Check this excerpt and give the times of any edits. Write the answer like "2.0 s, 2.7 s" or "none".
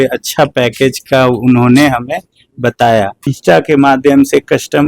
3.3 s